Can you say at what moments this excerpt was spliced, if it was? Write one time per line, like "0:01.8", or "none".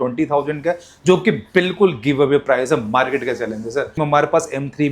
0:04.0

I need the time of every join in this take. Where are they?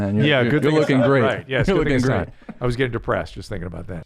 none

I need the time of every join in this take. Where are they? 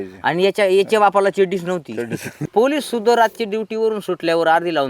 0:02.4

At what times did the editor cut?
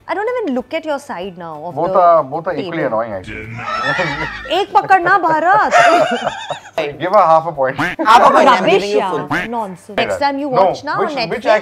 0:06.8
0:09.8

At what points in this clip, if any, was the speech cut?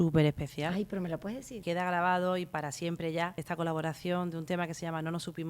0:01.6
0:03.4

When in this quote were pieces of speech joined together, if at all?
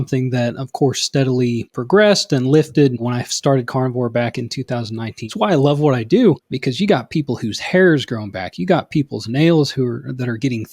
0:01.7
0:03.0
0:05.2
0:06.5

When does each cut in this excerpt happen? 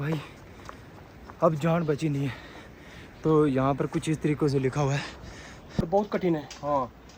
0:05.8

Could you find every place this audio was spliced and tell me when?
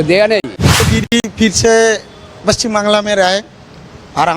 0:01.0

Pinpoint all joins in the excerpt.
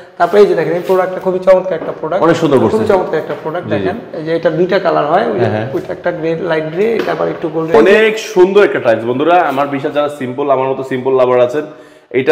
0:07.7

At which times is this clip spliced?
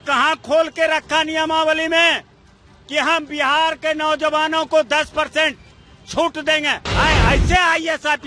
0:06.9

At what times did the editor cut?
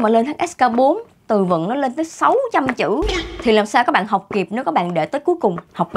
none

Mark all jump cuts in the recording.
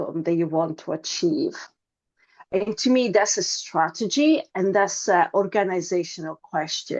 none

